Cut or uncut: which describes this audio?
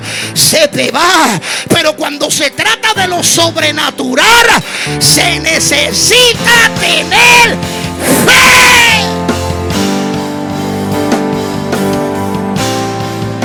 uncut